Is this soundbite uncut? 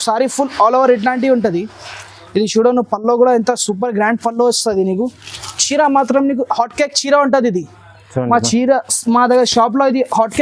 yes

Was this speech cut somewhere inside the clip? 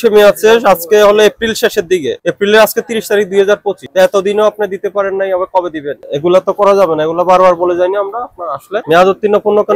yes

